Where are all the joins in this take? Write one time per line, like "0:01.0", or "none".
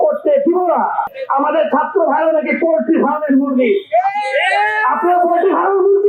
0:01.1